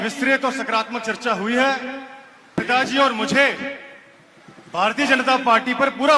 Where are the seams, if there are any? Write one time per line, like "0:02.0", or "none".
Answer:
0:02.6